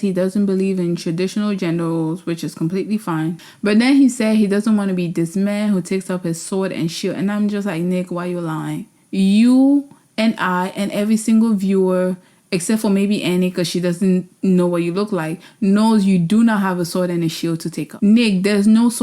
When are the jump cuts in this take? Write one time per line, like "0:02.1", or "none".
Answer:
0:03.4
0:17.9